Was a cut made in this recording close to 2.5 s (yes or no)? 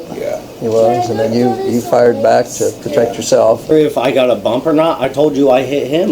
no